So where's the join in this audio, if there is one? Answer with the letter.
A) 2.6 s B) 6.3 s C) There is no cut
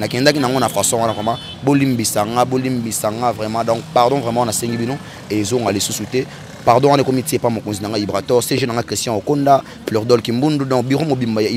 C